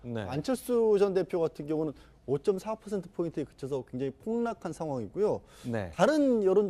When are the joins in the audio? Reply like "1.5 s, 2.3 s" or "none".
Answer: 4.7 s